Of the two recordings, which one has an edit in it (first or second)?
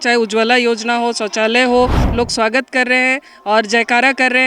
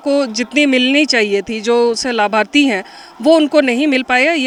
first